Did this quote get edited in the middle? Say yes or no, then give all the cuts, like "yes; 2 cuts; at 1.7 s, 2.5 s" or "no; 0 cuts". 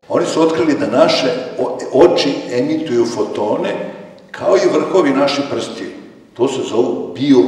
no; 0 cuts